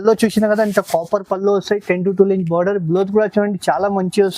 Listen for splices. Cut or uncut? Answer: uncut